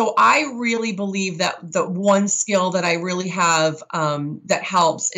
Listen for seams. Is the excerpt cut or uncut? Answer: uncut